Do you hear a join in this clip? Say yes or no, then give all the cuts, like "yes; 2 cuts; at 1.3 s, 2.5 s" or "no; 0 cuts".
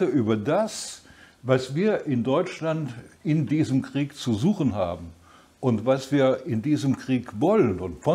no; 0 cuts